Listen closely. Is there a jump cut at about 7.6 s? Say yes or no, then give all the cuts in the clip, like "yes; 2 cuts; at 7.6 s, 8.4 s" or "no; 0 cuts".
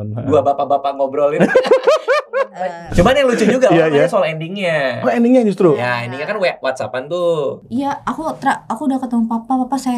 yes; 2 cuts; at 2.9 s, 7.6 s